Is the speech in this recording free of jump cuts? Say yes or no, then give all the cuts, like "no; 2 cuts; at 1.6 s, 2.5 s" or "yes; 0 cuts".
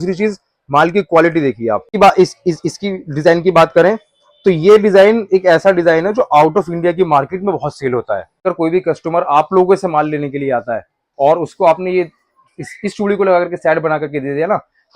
no; 2 cuts; at 1.9 s, 8.4 s